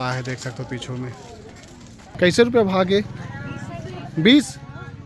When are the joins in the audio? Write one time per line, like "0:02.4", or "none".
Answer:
0:02.0